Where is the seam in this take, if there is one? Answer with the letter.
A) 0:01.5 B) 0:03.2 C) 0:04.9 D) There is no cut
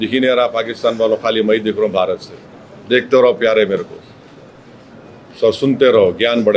D